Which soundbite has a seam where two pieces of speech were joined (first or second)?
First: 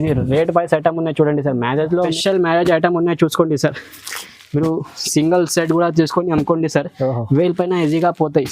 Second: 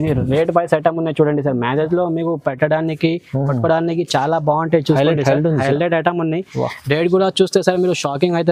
first